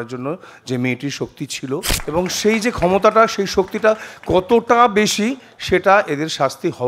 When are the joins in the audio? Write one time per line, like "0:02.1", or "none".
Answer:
0:01.9